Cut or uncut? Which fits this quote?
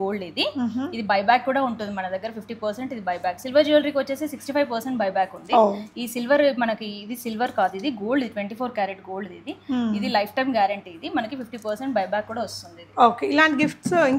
uncut